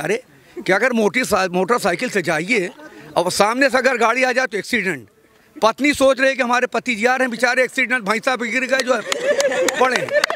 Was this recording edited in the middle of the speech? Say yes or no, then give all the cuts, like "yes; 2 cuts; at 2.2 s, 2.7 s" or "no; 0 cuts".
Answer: no; 0 cuts